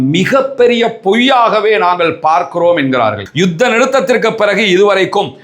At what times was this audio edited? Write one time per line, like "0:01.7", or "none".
0:03.2